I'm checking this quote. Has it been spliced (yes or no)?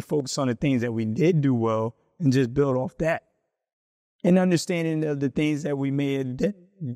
no